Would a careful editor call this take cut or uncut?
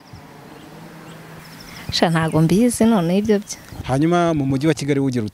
cut